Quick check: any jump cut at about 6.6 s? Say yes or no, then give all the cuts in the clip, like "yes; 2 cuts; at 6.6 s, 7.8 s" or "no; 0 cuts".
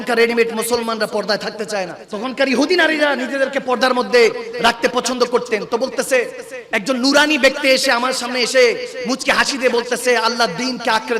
no; 1 cut; at 2.0 s